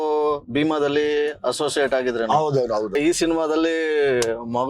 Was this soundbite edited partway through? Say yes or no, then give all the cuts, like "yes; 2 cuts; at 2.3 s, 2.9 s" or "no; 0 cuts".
yes; 1 cut; at 2.9 s